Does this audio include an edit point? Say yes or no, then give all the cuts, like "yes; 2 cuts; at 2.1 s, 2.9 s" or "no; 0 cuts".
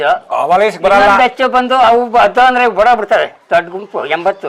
no; 0 cuts